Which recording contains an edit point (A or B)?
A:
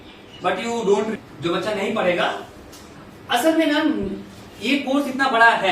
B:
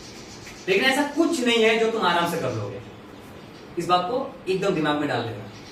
A